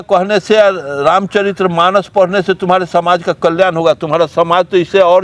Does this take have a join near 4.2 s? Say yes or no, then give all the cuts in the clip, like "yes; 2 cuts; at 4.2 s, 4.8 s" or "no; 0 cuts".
no; 0 cuts